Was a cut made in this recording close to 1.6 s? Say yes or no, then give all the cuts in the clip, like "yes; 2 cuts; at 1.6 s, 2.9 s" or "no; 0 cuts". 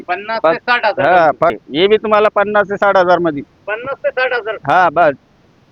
yes; 1 cut; at 1.6 s